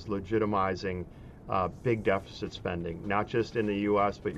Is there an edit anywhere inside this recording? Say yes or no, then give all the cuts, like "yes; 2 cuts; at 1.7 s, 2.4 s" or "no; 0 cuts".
no; 0 cuts